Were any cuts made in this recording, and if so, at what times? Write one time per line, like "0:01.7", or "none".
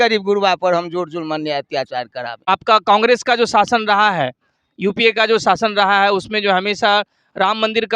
0:02.4